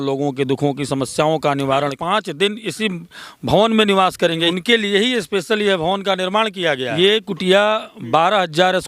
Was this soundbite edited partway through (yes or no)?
yes